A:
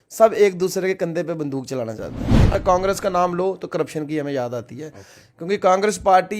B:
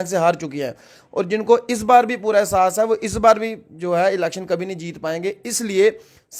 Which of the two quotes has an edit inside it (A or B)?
A